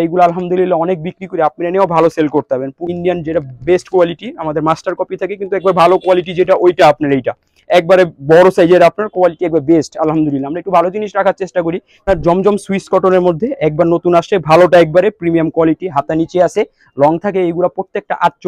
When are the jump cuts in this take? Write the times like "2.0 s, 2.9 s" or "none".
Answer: 2.8 s, 12.0 s